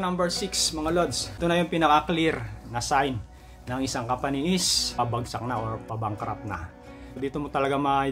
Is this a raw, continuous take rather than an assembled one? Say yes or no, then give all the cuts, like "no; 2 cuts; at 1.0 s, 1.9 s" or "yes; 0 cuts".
no; 3 cuts; at 1.3 s, 5.0 s, 7.2 s